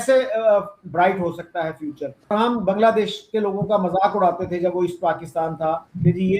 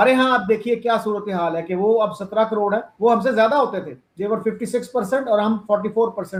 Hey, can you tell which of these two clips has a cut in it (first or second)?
first